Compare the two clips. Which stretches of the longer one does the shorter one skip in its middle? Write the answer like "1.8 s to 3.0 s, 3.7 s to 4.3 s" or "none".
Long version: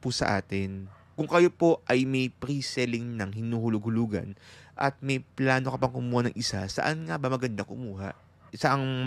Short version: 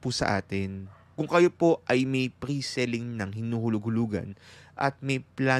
none